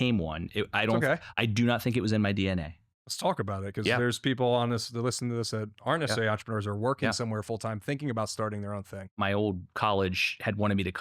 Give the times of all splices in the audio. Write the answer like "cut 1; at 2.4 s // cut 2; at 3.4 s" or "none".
cut 1; at 9.1 s